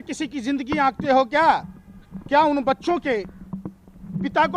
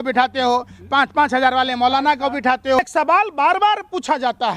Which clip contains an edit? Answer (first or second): second